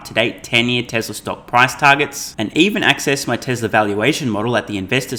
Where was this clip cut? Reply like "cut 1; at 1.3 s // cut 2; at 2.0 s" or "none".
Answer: none